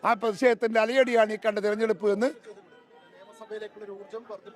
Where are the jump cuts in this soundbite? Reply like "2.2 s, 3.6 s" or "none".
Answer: none